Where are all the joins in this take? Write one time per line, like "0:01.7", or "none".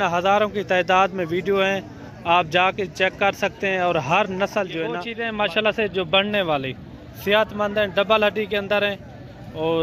0:05.1